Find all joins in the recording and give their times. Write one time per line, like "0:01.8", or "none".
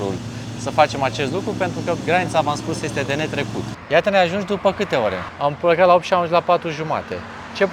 0:03.8
0:05.3